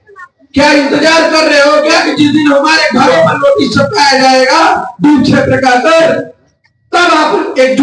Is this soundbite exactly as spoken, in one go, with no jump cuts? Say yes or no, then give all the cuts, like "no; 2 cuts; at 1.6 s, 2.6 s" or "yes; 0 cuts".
yes; 0 cuts